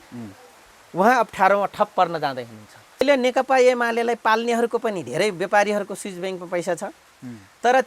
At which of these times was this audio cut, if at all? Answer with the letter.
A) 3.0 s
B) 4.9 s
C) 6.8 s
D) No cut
A